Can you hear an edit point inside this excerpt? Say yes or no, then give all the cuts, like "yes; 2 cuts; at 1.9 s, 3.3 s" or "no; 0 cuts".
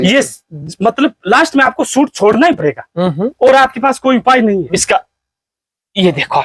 yes; 1 cut; at 4.7 s